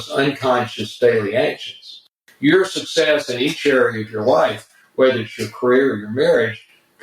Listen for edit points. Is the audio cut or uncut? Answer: cut